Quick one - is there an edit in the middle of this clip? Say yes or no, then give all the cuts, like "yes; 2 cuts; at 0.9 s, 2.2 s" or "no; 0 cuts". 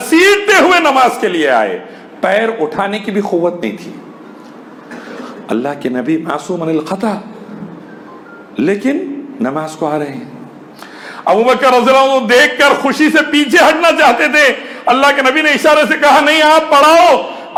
no; 0 cuts